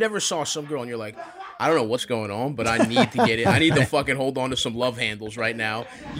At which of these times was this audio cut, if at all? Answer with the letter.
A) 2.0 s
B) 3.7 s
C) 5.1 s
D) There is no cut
A